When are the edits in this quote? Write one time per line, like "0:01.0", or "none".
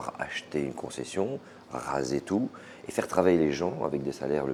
none